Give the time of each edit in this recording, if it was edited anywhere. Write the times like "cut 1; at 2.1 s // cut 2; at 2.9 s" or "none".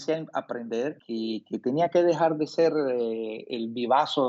cut 1; at 1.0 s